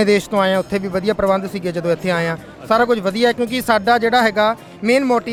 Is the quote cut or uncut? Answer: uncut